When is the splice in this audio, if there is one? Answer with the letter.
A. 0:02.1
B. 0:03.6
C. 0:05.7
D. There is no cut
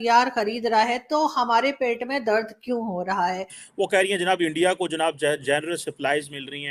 B